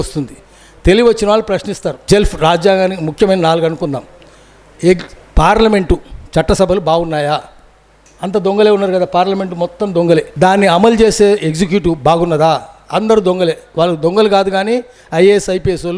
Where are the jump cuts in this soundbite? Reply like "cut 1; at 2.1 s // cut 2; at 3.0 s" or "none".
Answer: cut 1; at 1.9 s // cut 2; at 10.3 s